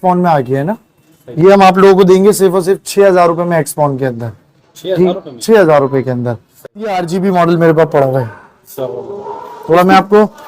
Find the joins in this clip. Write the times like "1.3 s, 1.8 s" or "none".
6.9 s